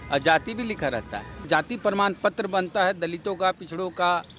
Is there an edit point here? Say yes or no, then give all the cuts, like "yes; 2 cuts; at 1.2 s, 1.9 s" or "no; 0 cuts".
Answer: yes; 1 cut; at 1.4 s